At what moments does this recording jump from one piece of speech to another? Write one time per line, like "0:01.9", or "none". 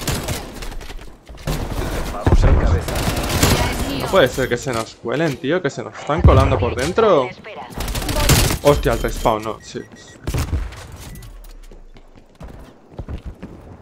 0:01.5